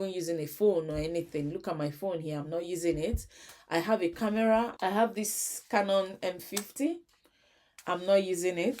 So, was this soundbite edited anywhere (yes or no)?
yes